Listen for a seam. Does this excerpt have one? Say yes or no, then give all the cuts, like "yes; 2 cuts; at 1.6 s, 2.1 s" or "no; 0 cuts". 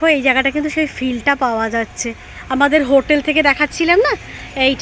no; 0 cuts